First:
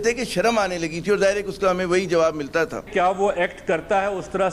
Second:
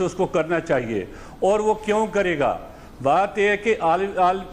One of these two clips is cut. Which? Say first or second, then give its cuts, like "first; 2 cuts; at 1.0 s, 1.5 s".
first; 1 cut; at 2.9 s